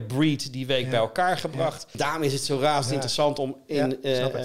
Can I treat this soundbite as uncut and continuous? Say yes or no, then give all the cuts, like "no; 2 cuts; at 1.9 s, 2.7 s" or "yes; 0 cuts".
no; 1 cut; at 1.9 s